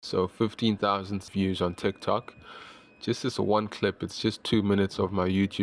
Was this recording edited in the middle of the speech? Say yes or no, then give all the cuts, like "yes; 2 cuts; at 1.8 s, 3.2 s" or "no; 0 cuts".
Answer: yes; 1 cut; at 1.2 s